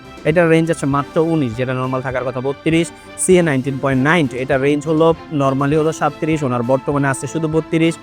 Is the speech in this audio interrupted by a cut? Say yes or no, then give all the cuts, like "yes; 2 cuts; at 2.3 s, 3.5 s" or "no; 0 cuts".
no; 0 cuts